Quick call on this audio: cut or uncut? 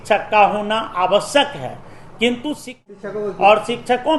cut